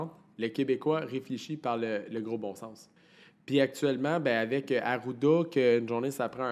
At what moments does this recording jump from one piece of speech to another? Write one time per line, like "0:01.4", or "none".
none